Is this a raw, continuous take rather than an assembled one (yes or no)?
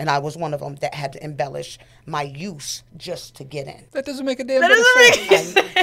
no